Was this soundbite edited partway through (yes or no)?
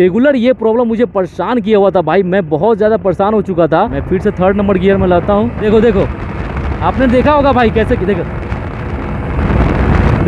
yes